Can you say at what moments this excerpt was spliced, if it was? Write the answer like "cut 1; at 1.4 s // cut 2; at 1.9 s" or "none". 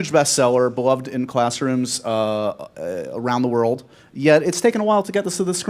cut 1; at 2.9 s